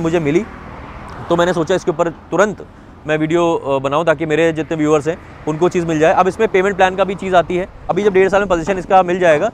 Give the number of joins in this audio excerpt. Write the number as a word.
one